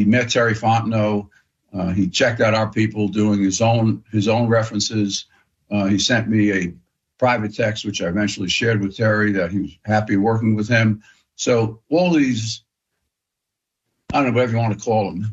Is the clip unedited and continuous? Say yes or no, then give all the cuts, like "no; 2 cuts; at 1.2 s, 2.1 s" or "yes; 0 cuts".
yes; 0 cuts